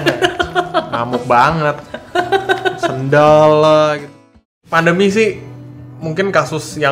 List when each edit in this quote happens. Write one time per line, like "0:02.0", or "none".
0:04.5